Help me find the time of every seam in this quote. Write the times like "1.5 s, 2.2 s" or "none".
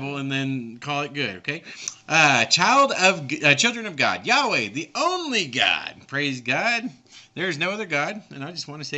1.9 s